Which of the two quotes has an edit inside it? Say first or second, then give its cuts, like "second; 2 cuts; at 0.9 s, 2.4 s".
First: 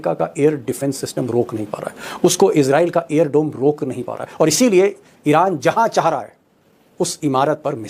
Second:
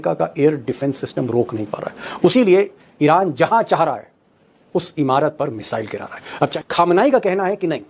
second; 2 cuts; at 2.3 s, 6.5 s